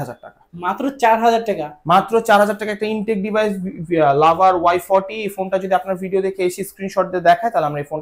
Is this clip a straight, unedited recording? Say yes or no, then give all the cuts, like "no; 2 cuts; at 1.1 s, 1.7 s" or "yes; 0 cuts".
yes; 0 cuts